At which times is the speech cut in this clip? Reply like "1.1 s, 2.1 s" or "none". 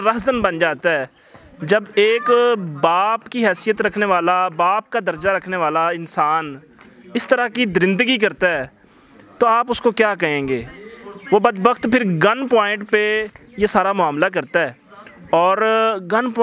none

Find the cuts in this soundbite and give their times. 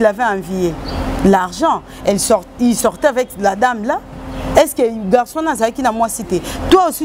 none

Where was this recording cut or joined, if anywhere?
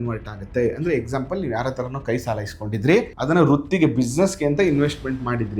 3.1 s

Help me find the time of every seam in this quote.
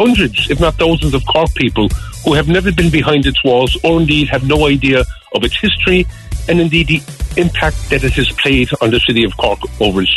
none

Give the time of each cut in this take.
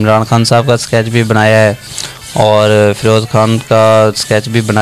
none

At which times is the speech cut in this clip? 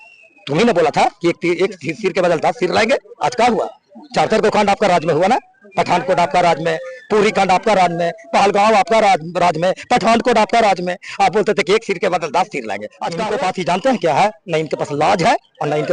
13.0 s

